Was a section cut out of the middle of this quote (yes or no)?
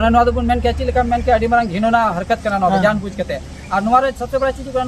no